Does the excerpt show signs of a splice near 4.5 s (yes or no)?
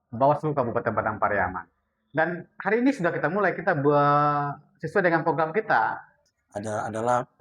no